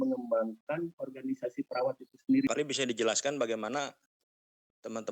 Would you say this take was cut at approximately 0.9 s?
no; 1 cut; at 2.5 s

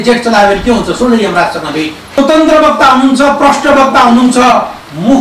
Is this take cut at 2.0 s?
yes; 1 cut; at 2.0 s

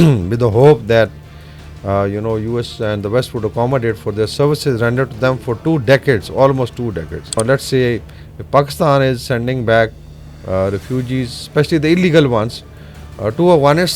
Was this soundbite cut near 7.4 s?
yes; 1 cut; at 7.4 s

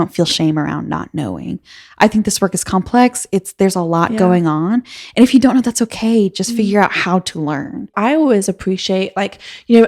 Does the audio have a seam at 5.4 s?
no; 1 cut; at 7.9 s

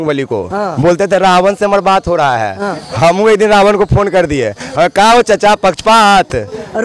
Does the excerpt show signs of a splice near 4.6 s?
no; 0 cuts

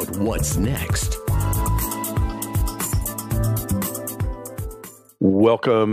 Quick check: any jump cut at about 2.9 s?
yes; 1 cut; at 2.9 s

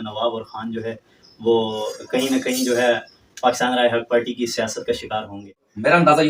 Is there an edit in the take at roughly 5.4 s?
yes; 1 cut; at 5.4 s

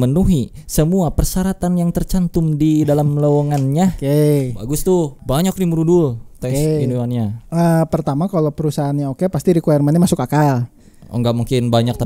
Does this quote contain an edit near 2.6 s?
no; 2 cuts; at 5.3 s, 7.4 s

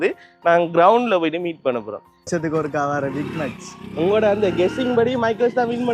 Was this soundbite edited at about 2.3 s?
yes; 1 cut; at 2.3 s

